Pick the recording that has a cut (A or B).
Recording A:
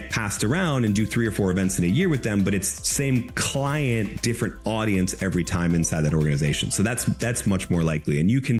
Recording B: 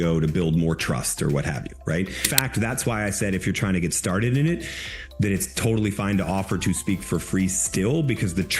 B